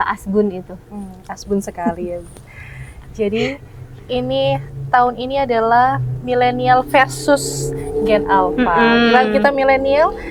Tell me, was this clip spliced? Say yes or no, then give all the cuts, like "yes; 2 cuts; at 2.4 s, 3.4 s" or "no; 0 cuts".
no; 0 cuts